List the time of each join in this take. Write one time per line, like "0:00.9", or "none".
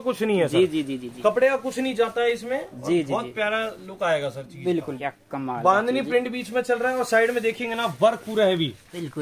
0:04.9